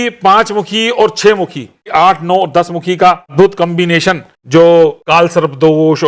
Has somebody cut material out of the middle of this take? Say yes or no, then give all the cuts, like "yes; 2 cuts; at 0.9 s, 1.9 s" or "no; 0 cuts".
yes; 4 cuts; at 1.9 s, 3.3 s, 4.3 s, 5.0 s